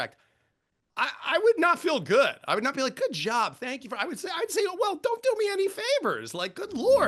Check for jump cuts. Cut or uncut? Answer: uncut